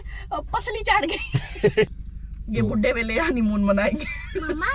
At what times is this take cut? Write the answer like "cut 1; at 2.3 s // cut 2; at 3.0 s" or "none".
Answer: cut 1; at 1.9 s